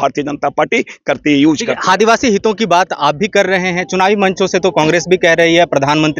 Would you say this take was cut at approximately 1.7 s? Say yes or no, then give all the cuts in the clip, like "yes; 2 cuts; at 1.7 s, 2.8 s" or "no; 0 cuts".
no; 0 cuts